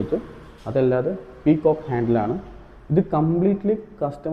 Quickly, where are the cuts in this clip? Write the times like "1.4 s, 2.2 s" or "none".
none